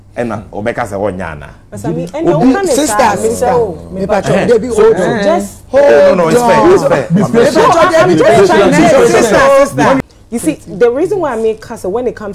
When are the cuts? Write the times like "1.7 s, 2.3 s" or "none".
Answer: 10.0 s